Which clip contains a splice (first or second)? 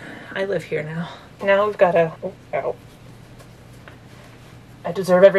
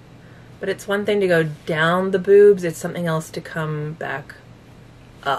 first